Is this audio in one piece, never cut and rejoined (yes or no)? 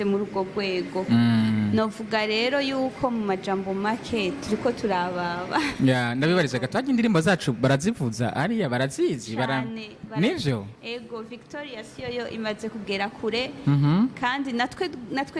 yes